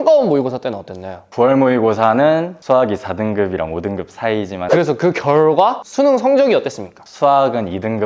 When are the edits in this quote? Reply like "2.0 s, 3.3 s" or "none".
1.3 s, 2.5 s, 4.6 s